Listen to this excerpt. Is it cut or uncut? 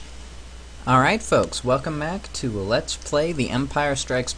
uncut